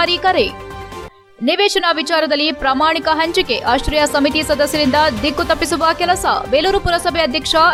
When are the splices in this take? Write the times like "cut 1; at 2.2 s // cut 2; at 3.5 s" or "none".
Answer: none